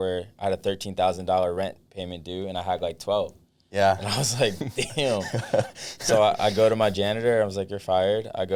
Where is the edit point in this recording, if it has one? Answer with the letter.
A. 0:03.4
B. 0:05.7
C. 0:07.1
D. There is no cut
D